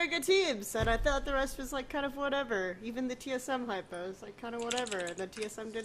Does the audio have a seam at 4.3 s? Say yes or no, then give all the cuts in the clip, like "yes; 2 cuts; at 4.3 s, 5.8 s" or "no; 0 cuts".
yes; 1 cut; at 4.3 s